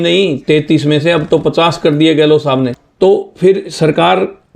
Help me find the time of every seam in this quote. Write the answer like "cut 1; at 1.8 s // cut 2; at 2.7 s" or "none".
cut 1; at 2.8 s